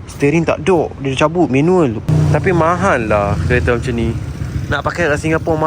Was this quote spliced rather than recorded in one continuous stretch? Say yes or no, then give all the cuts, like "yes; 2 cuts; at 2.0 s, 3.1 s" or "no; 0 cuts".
yes; 1 cut; at 2.1 s